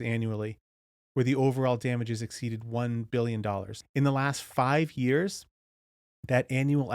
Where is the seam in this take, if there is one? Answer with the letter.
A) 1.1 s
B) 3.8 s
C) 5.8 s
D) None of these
B